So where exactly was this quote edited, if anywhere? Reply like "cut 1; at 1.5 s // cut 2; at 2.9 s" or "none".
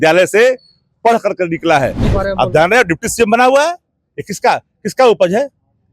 cut 1; at 2.1 s